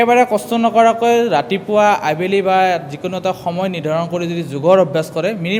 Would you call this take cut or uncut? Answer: uncut